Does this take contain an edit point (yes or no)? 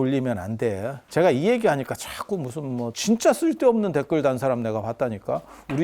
yes